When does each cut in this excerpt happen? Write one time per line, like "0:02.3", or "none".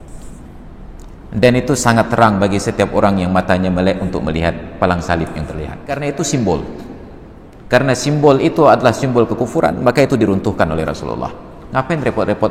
0:06.0